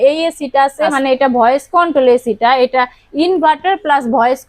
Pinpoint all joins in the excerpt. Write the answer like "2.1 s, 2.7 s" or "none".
0.9 s